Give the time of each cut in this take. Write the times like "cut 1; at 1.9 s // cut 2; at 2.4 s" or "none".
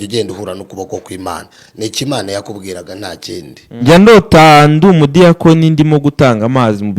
cut 1; at 3.8 s